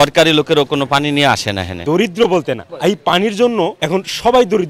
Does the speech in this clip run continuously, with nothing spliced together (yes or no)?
no